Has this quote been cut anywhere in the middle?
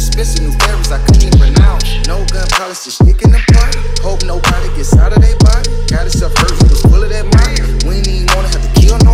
no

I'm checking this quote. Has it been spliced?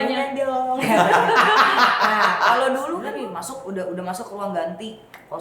yes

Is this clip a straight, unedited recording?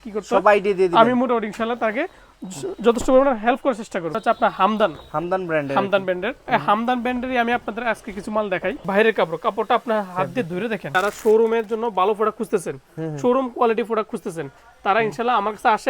no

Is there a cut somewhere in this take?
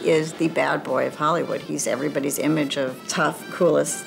yes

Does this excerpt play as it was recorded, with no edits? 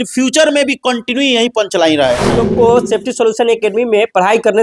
no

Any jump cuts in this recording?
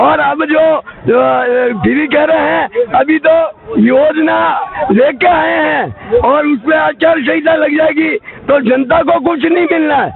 no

